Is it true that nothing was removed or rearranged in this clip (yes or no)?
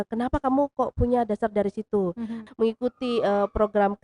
no